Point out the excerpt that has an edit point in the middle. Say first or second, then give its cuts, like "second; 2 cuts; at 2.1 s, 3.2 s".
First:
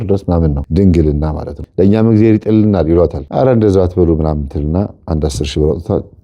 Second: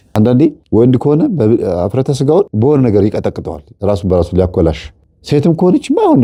first; 2 cuts; at 1.6 s, 3.2 s